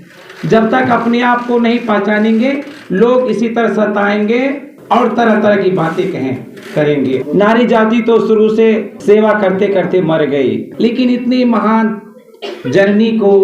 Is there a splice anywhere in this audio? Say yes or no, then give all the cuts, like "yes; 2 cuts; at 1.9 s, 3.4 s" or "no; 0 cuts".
yes; 4 cuts; at 4.7 s, 7.2 s, 8.9 s, 10.7 s